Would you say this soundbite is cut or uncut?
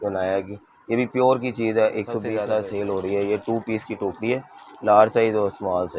cut